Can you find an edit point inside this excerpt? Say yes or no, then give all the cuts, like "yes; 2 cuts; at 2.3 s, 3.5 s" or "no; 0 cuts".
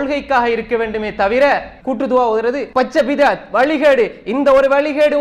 yes; 2 cuts; at 1.7 s, 2.6 s